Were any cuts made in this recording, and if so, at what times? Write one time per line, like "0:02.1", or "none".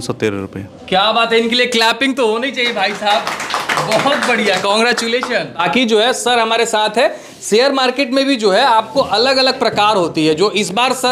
none